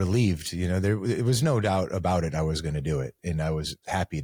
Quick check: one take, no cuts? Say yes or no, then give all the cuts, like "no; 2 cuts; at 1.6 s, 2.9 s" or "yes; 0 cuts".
yes; 0 cuts